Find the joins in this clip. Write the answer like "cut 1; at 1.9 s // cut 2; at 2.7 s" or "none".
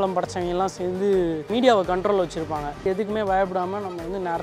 cut 1; at 1.5 s // cut 2; at 2.8 s